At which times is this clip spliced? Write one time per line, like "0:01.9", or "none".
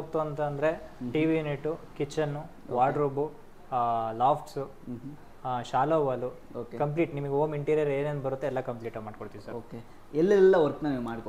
none